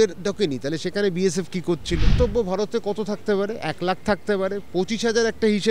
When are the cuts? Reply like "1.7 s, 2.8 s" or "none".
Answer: 2.1 s